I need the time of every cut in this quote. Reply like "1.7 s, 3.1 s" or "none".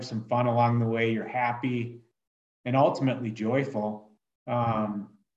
none